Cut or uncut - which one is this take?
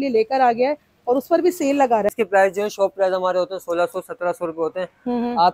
cut